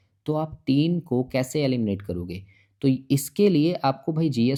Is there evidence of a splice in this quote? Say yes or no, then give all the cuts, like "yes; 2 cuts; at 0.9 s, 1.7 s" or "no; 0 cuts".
no; 0 cuts